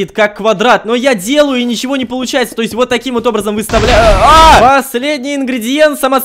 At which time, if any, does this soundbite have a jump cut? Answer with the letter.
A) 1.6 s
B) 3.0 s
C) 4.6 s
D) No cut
C